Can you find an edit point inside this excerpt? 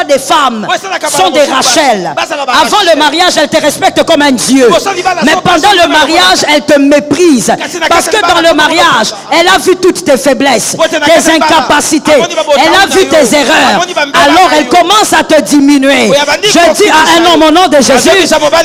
no; 0 cuts

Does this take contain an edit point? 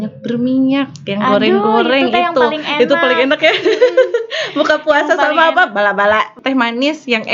yes; 1 cut; at 6.3 s

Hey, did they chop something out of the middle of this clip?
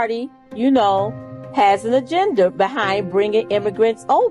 no; 0 cuts

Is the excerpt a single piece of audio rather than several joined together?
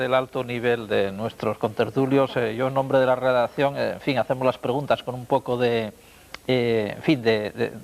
no; 1 cut; at 5.6 s

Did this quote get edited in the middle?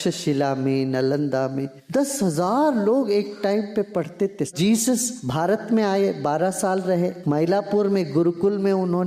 yes; 4 cuts; at 1.7 s, 4.5 s, 5.2 s, 7.2 s

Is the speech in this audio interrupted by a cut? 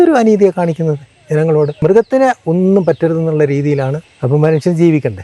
yes; 2 cuts; at 1.8 s, 4.1 s

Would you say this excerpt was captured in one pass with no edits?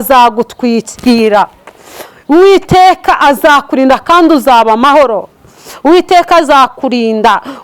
no; 1 cut; at 5.7 s

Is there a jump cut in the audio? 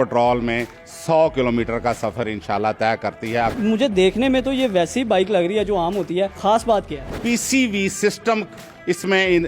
yes; 3 cuts; at 3.5 s, 6.3 s, 7.2 s

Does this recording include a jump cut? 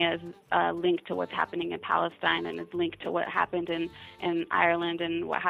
no; 0 cuts

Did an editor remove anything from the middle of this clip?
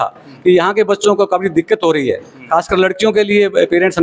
no; 0 cuts

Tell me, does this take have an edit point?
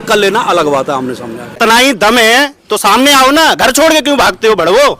yes; 1 cut; at 1.6 s

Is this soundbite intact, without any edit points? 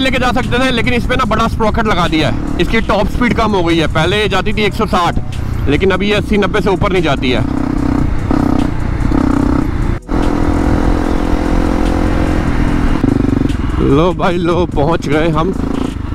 yes; 0 cuts

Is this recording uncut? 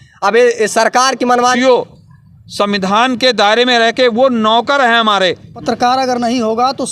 no; 2 cuts; at 1.5 s, 5.5 s

